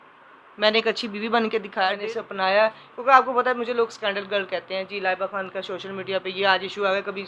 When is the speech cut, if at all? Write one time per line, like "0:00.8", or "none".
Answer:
0:02.0